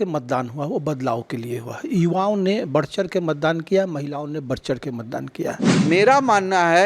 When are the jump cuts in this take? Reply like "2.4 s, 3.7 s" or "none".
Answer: 5.7 s